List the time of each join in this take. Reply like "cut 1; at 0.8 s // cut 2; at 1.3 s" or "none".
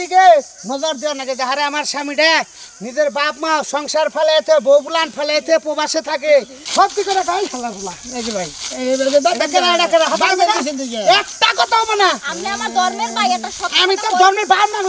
cut 1; at 6.6 s